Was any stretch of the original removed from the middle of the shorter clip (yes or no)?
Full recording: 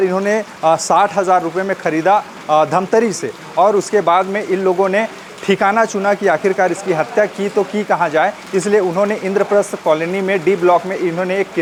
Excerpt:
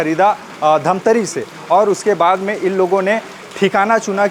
no